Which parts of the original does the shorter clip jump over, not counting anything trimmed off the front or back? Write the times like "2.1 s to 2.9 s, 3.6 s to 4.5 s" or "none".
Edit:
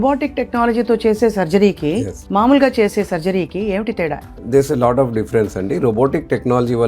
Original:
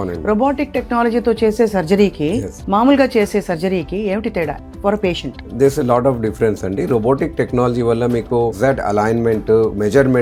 4.7 s to 5.4 s